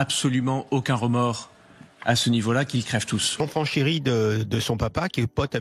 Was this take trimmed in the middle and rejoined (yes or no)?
yes